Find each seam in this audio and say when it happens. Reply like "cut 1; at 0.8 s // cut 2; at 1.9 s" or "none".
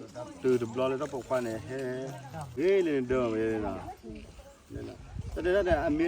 cut 1; at 2.6 s